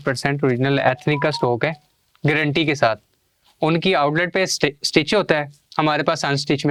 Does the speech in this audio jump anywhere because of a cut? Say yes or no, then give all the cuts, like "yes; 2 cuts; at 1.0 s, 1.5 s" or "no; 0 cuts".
no; 0 cuts